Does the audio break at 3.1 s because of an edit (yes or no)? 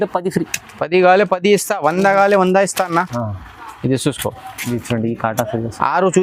yes